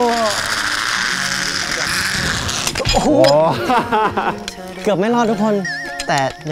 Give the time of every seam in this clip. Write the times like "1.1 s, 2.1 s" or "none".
3.0 s